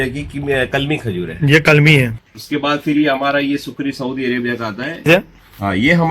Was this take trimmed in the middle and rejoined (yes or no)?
yes